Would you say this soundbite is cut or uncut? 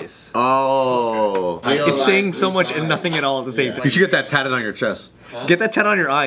cut